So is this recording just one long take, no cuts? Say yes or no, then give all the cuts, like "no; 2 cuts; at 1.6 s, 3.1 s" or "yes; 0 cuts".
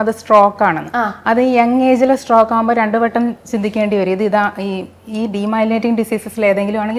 yes; 0 cuts